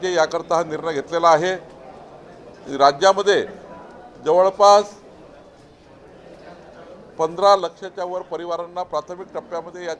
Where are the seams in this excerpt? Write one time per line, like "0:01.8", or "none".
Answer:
none